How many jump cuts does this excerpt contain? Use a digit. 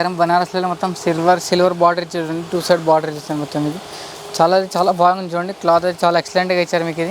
0